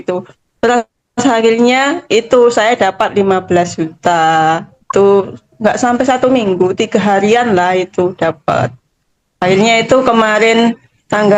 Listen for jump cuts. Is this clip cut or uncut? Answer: uncut